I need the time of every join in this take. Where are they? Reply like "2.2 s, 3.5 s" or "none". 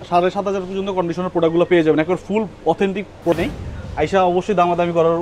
3.3 s